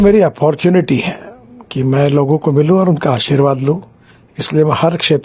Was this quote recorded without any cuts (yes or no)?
yes